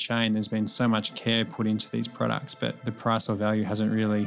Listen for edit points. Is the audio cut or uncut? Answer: cut